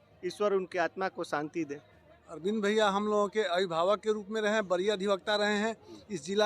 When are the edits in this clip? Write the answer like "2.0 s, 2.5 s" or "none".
none